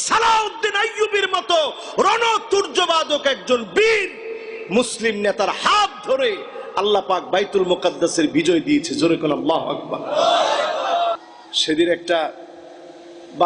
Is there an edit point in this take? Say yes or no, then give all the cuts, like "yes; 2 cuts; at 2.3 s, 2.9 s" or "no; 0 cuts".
yes; 1 cut; at 11.2 s